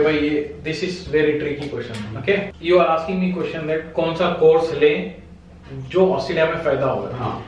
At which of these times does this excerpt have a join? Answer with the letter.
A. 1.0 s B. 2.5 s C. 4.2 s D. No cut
D